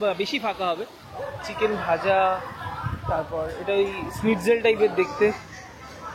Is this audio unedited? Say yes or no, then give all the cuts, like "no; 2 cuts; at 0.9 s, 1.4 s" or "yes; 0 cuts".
no; 1 cut; at 0.9 s